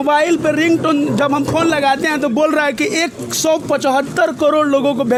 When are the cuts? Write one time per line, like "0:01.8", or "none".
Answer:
none